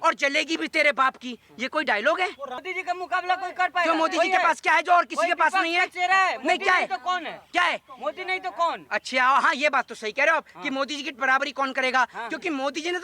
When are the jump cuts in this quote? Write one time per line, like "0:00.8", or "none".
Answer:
0:02.6